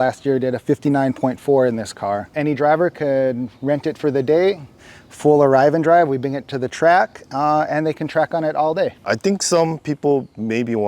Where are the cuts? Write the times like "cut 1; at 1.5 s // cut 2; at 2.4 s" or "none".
cut 1; at 2.3 s // cut 2; at 9.0 s

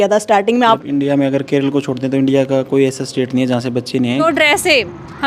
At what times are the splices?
cut 1; at 0.8 s // cut 2; at 4.2 s

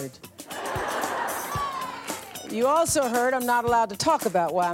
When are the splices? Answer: cut 1; at 2.5 s

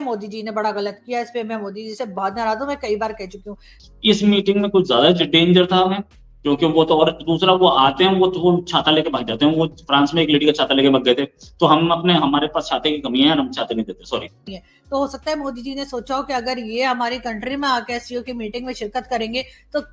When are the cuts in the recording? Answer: cut 1; at 3.7 s // cut 2; at 14.4 s

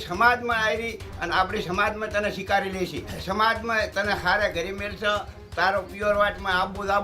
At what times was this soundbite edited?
cut 1; at 3.1 s

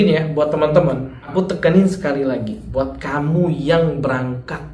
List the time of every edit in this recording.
cut 1; at 1.1 s

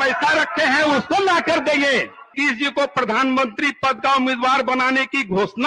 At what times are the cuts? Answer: cut 1; at 2.3 s

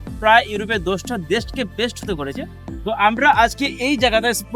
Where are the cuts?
none

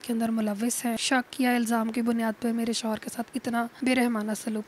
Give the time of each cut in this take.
cut 1; at 1.0 s // cut 2; at 3.7 s

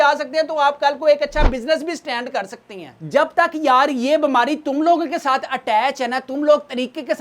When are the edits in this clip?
cut 1; at 2.9 s

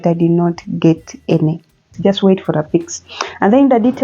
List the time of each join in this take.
cut 1; at 1.9 s

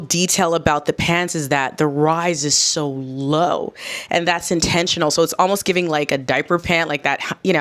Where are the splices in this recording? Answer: none

